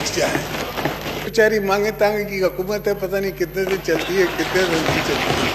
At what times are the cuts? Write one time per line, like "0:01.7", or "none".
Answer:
0:01.3